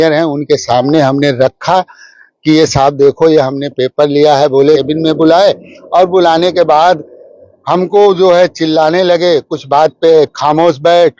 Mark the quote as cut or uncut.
cut